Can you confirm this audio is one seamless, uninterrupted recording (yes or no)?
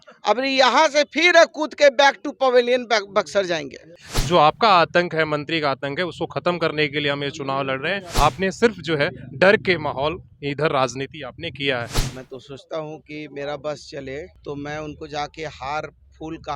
no